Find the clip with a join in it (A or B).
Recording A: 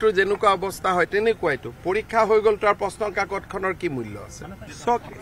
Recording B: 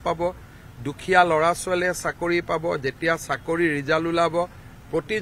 A